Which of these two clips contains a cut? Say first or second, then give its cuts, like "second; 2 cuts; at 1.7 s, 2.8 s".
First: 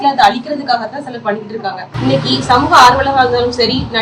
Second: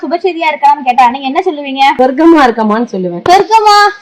second; 2 cuts; at 1.9 s, 3.1 s